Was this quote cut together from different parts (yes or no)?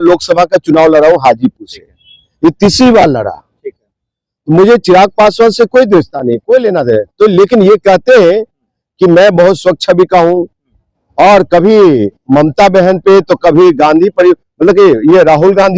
no